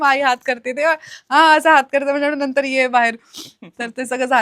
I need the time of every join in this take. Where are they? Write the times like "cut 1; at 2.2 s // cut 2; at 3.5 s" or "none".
none